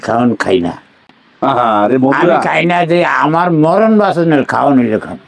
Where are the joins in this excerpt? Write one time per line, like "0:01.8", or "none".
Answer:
none